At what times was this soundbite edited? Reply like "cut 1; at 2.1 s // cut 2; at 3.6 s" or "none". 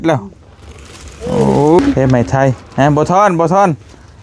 cut 1; at 1.8 s